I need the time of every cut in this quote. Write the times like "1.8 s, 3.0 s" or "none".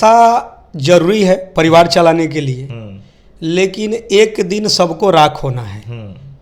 none

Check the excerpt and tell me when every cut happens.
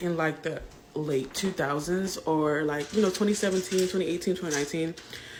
none

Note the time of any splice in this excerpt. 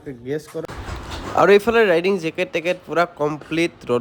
none

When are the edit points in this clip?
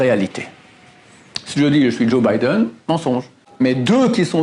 3.4 s

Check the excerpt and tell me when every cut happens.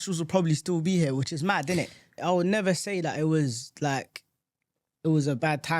2.2 s

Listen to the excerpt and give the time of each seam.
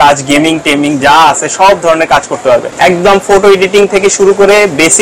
2.7 s

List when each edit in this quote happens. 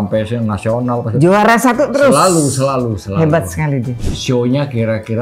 4.0 s

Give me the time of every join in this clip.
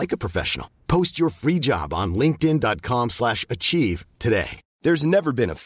none

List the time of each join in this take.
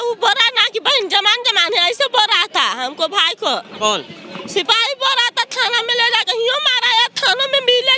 none

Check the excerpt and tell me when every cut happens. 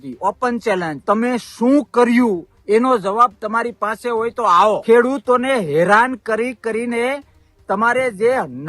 1.0 s, 4.8 s

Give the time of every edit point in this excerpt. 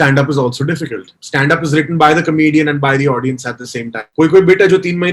1.2 s, 4.0 s

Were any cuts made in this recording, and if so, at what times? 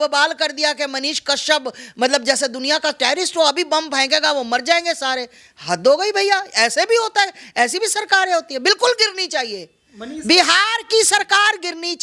none

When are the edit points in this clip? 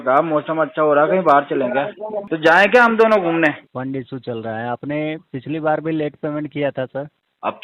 2.3 s, 3.7 s

